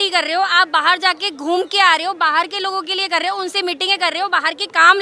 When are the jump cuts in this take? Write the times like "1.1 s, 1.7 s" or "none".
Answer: none